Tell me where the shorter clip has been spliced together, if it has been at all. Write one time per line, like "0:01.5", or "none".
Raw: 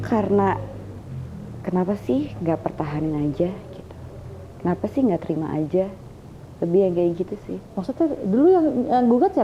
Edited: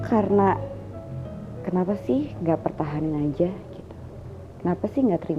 none